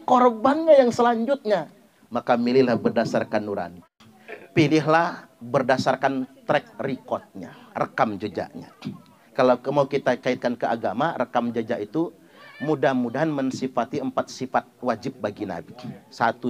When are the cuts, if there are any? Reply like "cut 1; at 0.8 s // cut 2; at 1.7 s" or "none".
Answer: cut 1; at 3.9 s